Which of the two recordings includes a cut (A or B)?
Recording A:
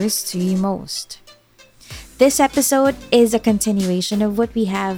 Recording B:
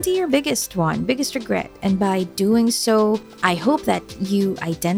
B